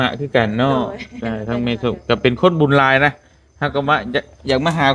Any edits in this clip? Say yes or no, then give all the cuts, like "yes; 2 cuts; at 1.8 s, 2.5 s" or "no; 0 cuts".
no; 0 cuts